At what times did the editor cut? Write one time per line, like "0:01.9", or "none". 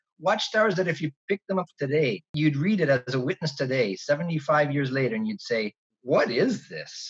0:02.3
0:05.9